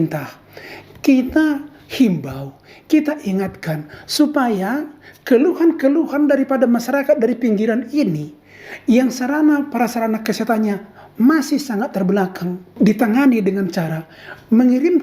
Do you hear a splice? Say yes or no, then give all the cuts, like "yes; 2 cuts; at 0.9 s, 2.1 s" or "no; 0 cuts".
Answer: no; 0 cuts